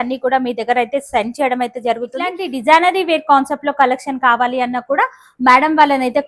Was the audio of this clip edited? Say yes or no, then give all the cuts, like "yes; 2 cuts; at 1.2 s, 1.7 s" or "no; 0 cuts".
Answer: yes; 1 cut; at 2.5 s